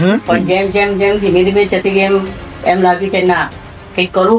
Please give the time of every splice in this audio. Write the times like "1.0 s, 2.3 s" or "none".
none

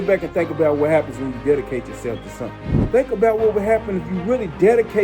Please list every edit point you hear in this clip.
2.8 s

